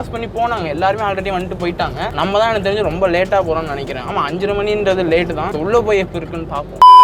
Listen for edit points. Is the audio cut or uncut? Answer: uncut